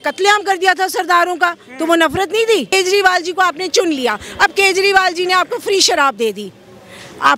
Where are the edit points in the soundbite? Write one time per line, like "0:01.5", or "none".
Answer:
0:02.7